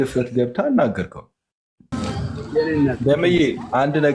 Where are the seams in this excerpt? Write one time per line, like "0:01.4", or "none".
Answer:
0:01.9